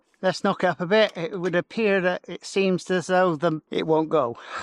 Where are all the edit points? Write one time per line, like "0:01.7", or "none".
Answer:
0:03.7